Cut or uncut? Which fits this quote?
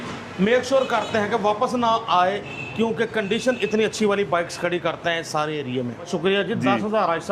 cut